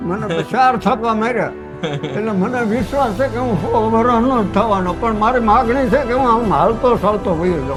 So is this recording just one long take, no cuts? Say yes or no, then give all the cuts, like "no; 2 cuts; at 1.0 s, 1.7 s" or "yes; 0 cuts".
yes; 0 cuts